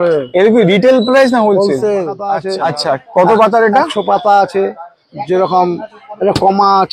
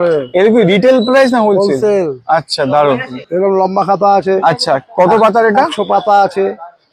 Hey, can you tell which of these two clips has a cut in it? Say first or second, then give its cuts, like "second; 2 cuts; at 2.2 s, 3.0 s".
first; 1 cut; at 2.4 s